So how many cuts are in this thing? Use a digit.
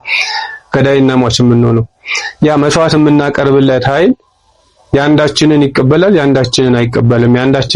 0